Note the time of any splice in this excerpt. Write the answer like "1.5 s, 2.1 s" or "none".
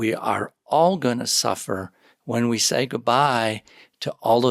none